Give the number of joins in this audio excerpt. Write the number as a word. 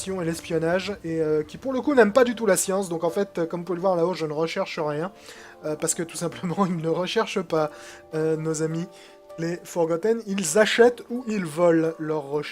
one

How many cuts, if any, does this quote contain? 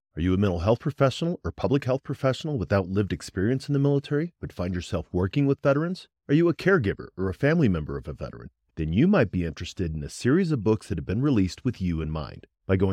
zero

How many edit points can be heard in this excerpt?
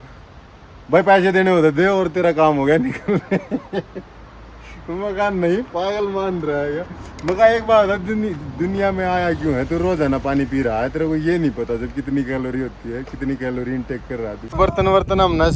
one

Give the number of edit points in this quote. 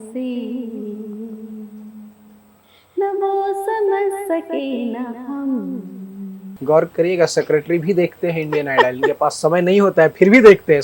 one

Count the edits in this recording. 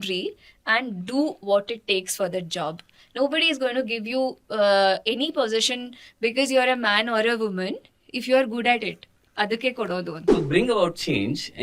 one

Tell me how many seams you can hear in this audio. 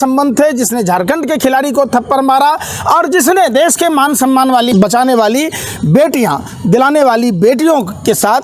one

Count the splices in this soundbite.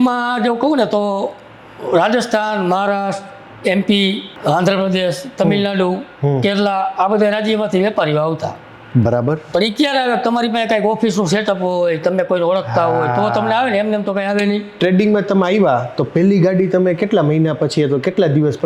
three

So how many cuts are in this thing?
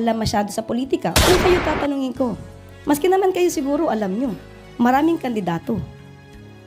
one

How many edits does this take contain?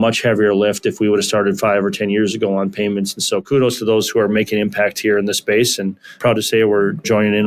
one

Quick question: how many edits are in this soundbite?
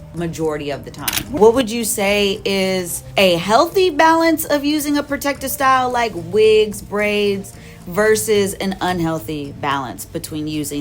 two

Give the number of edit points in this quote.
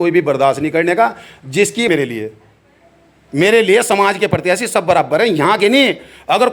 one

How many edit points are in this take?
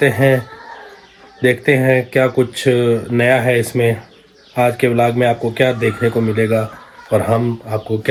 zero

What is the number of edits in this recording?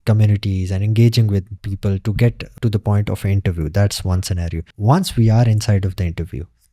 two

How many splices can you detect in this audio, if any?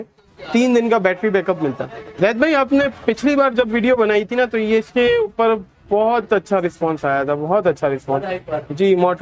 one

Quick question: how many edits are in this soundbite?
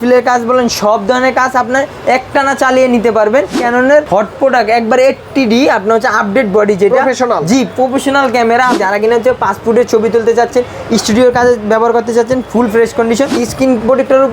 two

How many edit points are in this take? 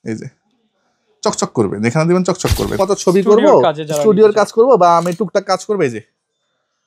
one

